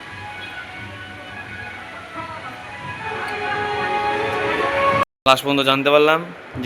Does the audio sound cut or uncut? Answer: cut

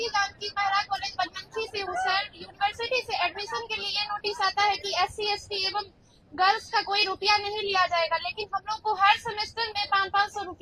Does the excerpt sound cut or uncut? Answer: uncut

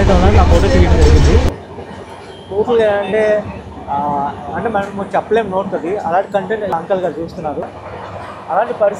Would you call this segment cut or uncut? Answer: cut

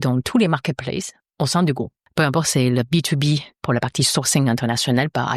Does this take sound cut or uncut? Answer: cut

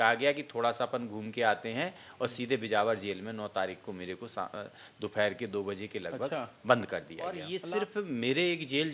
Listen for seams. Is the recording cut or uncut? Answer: cut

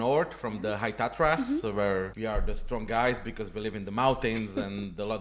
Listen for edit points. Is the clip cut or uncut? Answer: cut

